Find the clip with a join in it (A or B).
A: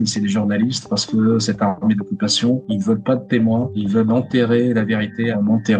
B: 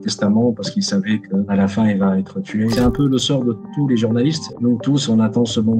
B